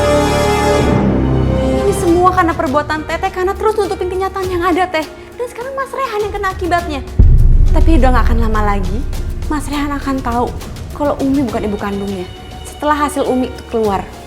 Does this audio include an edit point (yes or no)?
yes